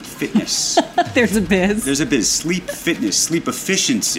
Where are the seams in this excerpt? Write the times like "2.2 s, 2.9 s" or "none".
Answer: none